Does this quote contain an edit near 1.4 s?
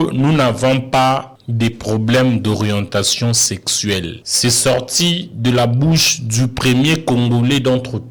yes; 2 cuts; at 1.4 s, 4.2 s

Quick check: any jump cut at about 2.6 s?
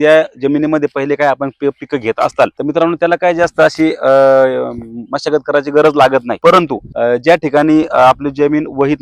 yes; 2 cuts; at 2.6 s, 6.6 s

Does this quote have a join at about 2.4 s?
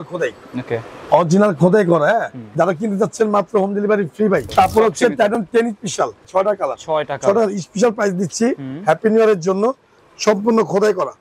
yes; 4 cuts; at 2.4 s, 4.5 s, 6.2 s, 9.9 s

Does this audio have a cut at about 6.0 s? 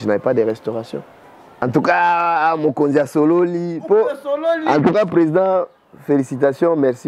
no; 1 cut; at 1.5 s

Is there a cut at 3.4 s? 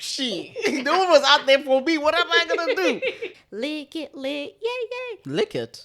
yes; 1 cut; at 3.4 s

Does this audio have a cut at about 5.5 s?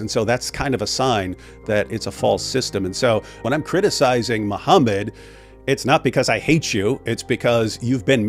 no; 1 cut; at 3.4 s

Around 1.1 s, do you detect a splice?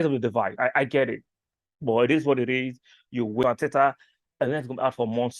no; 1 cut; at 3.4 s

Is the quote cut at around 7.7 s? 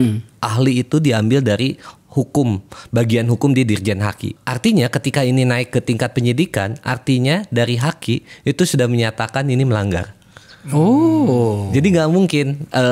no; 1 cut; at 4.3 s

